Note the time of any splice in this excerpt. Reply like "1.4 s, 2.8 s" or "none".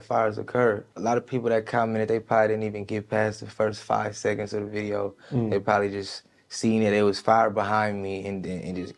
none